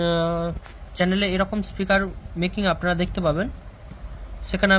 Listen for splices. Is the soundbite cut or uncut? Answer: uncut